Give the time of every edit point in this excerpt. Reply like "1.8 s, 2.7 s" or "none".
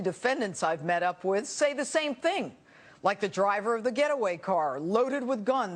none